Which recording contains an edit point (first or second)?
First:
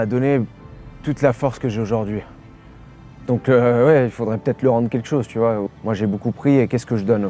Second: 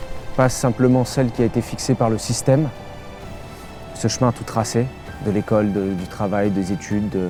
first